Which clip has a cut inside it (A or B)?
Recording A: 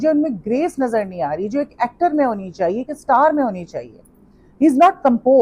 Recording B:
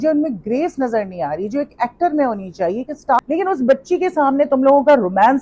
B